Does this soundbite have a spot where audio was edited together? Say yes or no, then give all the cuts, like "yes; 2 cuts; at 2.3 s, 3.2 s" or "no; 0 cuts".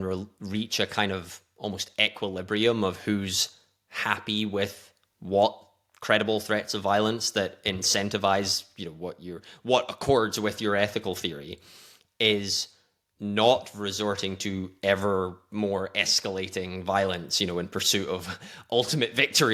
no; 0 cuts